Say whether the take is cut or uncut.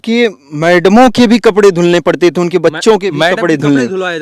uncut